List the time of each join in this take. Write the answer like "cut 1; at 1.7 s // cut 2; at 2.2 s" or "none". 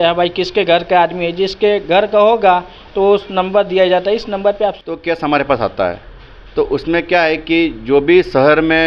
cut 1; at 4.8 s